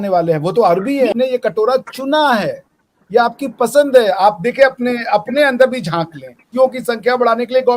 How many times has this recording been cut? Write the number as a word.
two